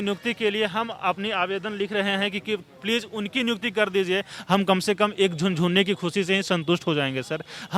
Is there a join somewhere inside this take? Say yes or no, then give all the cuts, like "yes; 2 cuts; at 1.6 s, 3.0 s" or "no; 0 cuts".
no; 0 cuts